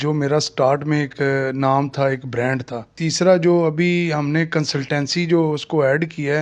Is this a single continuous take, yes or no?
no